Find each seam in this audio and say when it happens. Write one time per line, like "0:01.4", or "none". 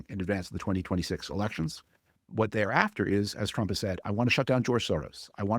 0:02.1

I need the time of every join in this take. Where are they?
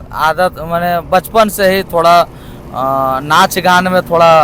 none

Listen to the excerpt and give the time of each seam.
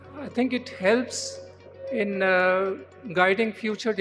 none

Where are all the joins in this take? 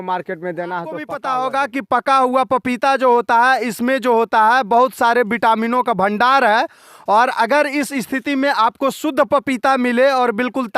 0:01.2

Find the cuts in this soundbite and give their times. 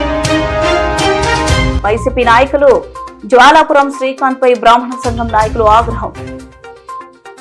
none

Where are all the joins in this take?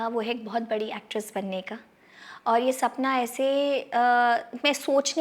none

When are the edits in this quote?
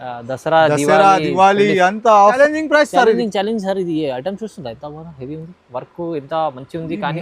0:02.4

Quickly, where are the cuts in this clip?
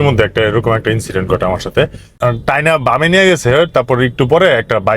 0:02.0

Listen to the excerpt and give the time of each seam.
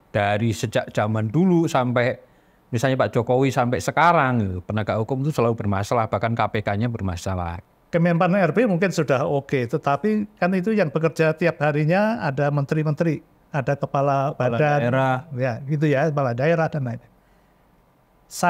0:07.6

